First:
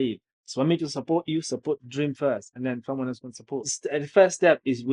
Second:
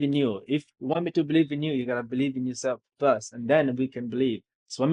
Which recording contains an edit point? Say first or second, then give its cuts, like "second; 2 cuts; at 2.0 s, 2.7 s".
first; 1 cut; at 3.7 s